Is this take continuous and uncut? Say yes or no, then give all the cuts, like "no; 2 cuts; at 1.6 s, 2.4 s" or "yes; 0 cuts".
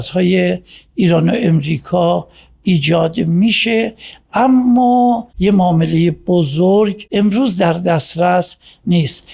no; 2 cuts; at 5.3 s, 7.0 s